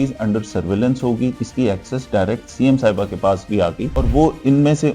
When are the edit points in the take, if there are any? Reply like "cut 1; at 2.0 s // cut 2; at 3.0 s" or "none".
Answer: cut 1; at 1.3 s // cut 2; at 3.9 s